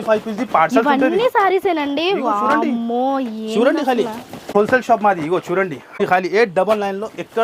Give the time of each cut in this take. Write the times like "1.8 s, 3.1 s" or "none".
4.5 s, 6.0 s